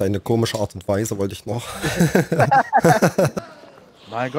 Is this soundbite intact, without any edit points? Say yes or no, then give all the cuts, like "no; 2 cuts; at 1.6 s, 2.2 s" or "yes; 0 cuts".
no; 1 cut; at 3.4 s